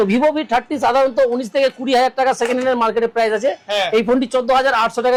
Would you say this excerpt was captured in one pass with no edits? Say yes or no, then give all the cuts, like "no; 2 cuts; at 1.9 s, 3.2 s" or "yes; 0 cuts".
yes; 0 cuts